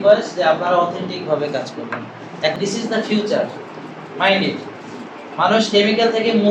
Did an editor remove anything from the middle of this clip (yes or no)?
yes